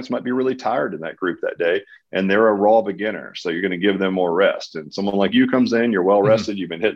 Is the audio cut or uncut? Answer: uncut